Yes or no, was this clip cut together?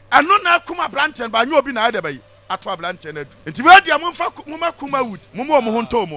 yes